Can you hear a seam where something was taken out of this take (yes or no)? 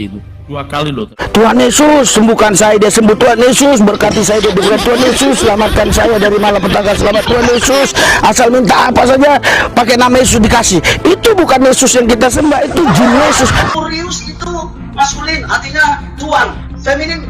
yes